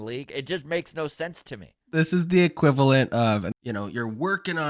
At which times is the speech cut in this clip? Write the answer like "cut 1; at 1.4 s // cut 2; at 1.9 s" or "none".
cut 1; at 1.8 s // cut 2; at 3.5 s